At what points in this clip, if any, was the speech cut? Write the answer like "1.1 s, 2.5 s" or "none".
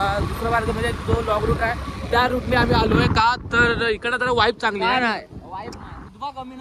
none